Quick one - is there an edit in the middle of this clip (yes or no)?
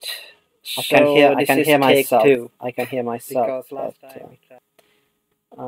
yes